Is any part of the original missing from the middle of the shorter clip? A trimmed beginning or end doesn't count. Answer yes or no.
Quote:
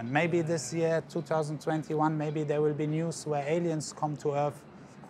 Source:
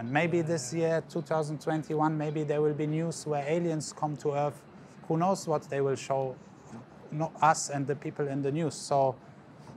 no